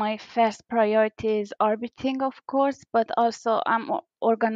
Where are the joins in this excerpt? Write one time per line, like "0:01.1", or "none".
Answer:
none